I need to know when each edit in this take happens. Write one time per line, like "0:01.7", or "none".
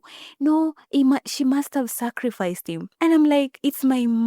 0:02.9